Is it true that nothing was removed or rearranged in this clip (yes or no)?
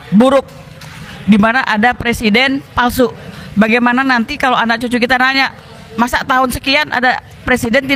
yes